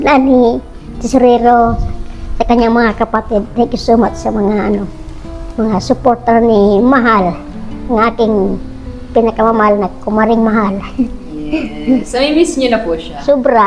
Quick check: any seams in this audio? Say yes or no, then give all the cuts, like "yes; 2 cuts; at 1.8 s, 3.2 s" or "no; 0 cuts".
no; 0 cuts